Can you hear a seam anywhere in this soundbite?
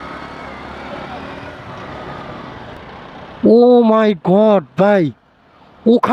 yes; 1 cut; at 2.8 s

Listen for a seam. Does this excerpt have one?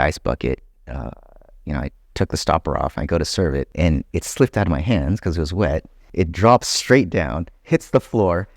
yes; 2 cuts; at 3.7 s, 6.0 s

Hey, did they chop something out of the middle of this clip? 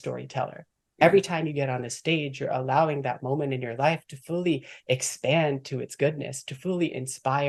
no; 0 cuts

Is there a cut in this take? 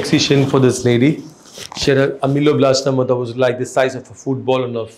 no; 0 cuts

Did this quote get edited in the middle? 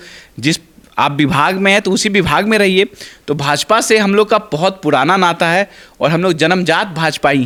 no; 0 cuts

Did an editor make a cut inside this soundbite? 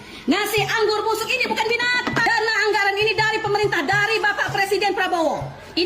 yes; 1 cut; at 2.3 s

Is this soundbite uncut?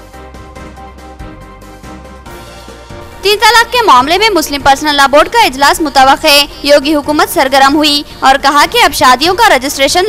no; 1 cut; at 1.0 s

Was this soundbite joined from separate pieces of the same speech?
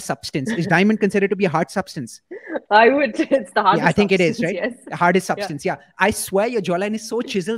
no; 0 cuts

